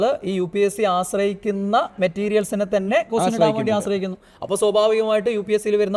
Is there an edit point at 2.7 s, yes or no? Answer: no